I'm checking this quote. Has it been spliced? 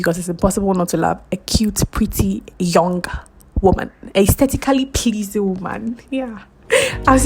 no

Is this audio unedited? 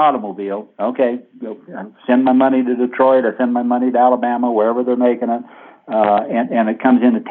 yes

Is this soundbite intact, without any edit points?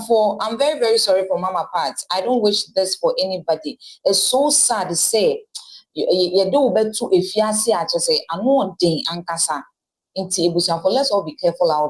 yes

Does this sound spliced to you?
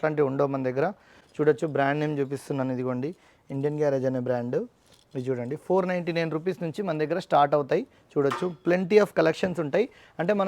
no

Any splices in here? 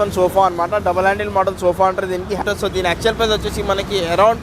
yes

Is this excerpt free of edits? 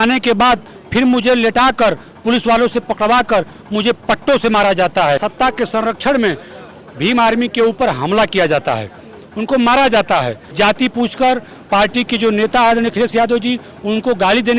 no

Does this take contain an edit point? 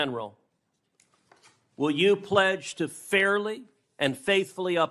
no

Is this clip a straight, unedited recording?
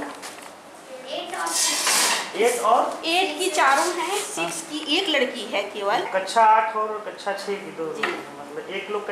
no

